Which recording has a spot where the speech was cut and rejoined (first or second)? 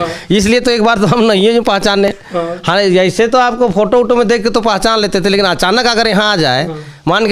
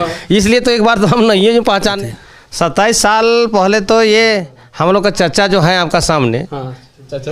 second